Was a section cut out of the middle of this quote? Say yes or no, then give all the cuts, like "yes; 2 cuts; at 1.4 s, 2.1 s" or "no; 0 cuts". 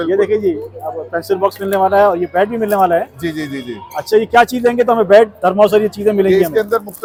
no; 0 cuts